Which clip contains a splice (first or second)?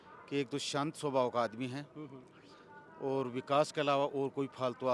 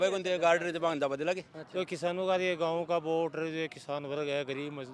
second